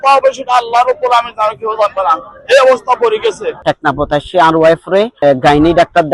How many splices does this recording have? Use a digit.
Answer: 1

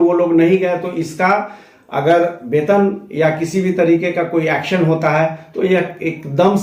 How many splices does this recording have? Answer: 0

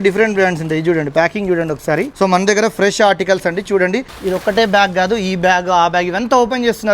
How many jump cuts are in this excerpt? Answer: 2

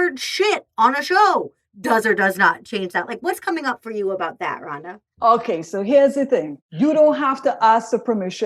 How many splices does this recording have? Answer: 1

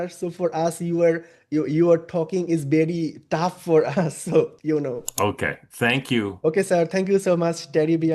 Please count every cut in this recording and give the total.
1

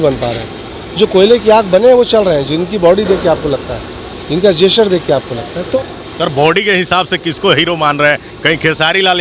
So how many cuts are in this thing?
0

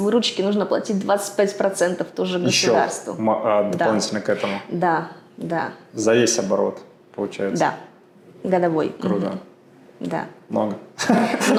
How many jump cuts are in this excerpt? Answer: 0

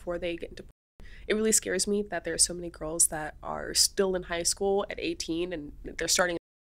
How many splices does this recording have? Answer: 0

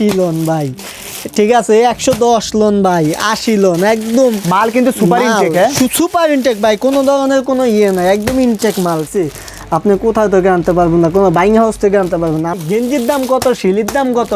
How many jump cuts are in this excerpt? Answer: 2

